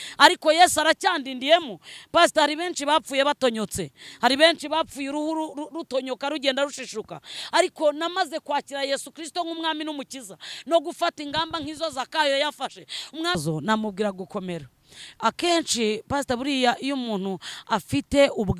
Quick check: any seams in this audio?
yes; 1 cut; at 13.4 s

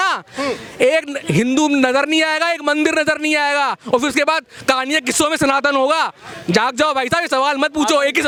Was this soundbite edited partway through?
no; 0 cuts

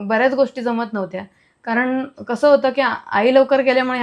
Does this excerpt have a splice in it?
no; 0 cuts

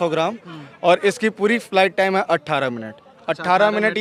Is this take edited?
no; 0 cuts

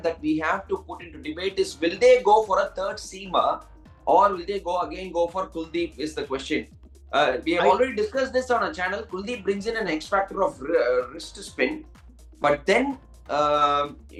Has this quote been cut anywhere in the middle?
no; 0 cuts

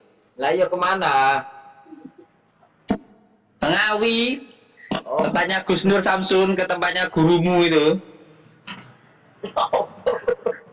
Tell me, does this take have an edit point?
no; 0 cuts

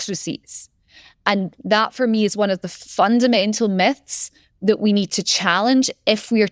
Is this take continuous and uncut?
yes; 0 cuts

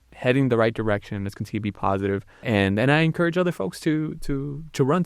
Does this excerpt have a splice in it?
yes; 1 cut; at 2.4 s

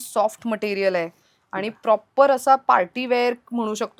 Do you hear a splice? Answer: no; 0 cuts

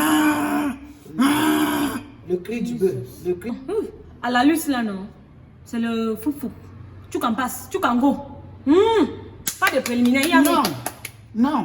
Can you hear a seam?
yes; 1 cut; at 3.6 s

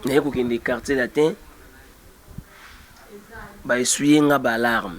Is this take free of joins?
yes; 0 cuts

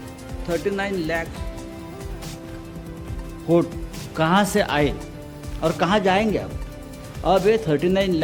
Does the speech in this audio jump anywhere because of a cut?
no; 0 cuts

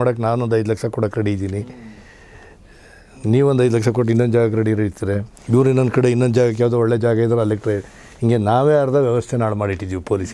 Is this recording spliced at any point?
no; 0 cuts

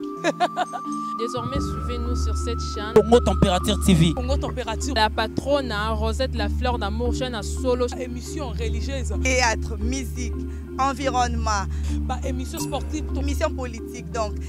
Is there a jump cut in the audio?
no; 0 cuts

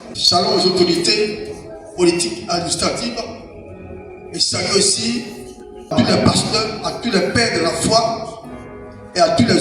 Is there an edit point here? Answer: yes; 1 cut; at 5.9 s

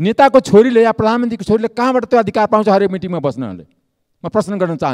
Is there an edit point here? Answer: no; 0 cuts

